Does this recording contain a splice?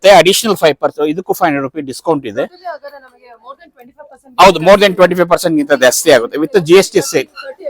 no; 0 cuts

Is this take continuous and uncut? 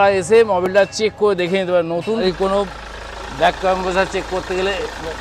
no; 1 cut; at 2.2 s

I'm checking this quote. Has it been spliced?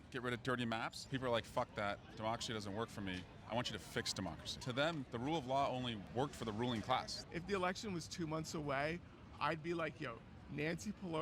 yes; 4 cuts; at 1.0 s, 4.8 s, 6.0 s, 7.2 s

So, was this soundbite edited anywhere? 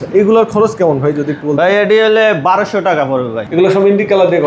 yes; 1 cut; at 3.4 s

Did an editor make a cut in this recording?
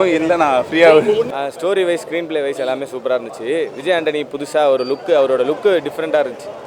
no; 0 cuts

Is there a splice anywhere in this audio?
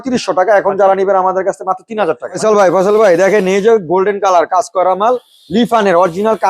yes; 1 cut; at 2.3 s

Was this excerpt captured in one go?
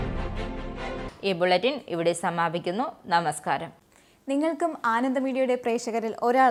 yes; 0 cuts

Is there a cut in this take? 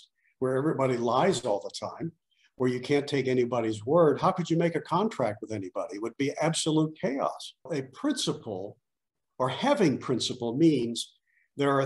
yes; 1 cut; at 7.7 s

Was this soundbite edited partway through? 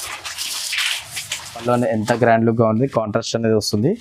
yes; 1 cut; at 1.6 s

